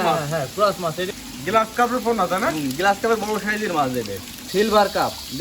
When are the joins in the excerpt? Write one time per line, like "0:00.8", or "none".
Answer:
0:01.1
0:04.5